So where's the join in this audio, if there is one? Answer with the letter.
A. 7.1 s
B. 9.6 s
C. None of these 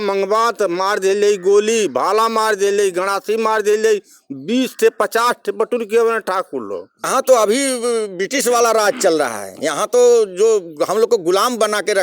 A